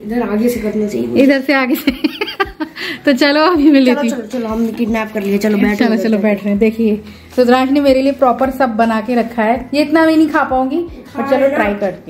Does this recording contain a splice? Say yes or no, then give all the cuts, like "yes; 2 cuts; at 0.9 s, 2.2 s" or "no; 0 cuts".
no; 0 cuts